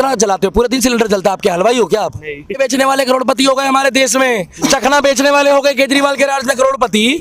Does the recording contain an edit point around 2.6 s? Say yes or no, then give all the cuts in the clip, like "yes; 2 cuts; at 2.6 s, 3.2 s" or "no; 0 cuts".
yes; 1 cut; at 2.6 s